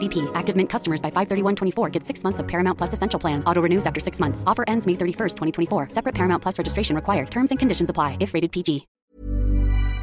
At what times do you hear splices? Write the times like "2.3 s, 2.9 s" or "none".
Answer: 8.9 s